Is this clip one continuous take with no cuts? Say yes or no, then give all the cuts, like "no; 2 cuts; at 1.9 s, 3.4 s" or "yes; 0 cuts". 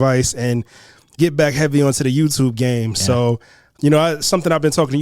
no; 1 cut; at 3.7 s